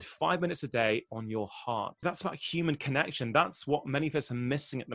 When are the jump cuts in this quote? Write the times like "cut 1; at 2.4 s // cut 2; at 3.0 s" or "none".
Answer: cut 1; at 2.0 s